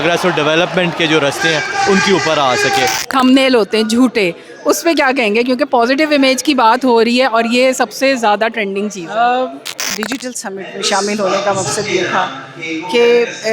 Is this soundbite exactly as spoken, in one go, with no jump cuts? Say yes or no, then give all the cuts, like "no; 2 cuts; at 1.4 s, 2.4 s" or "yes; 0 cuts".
no; 2 cuts; at 3.0 s, 9.9 s